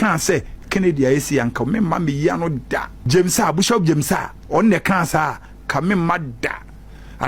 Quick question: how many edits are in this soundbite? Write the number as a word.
one